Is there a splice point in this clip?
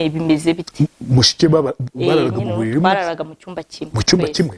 no; 0 cuts

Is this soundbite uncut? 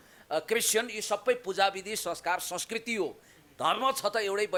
yes; 0 cuts

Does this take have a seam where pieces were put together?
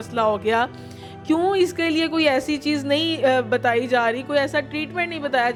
no; 0 cuts

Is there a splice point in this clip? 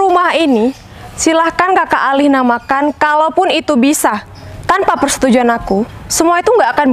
no; 0 cuts

